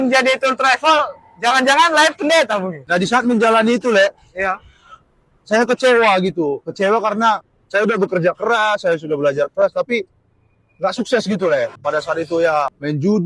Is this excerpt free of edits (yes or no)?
no